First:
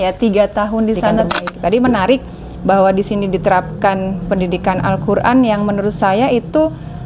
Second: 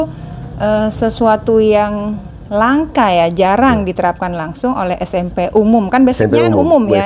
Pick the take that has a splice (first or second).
first